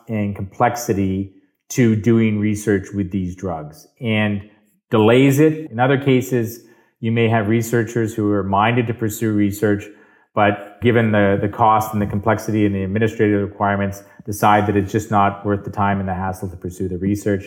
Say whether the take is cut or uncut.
cut